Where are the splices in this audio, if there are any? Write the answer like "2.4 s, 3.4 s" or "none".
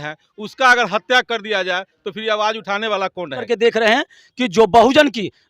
3.4 s